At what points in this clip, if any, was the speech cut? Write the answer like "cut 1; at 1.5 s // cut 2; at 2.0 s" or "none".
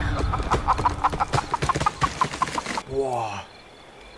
cut 1; at 2.9 s